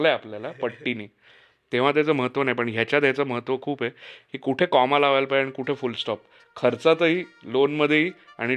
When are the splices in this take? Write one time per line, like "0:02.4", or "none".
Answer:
none